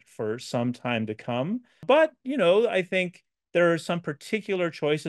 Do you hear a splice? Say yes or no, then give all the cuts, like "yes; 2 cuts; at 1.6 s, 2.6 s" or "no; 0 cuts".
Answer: yes; 1 cut; at 1.7 s